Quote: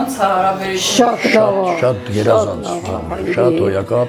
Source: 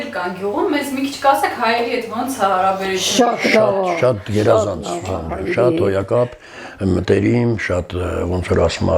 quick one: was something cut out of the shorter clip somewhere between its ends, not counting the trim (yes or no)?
no